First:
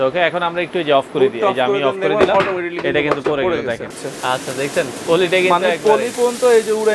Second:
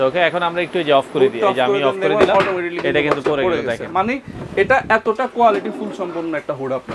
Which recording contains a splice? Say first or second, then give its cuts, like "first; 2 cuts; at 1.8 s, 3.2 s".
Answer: first; 1 cut; at 3.9 s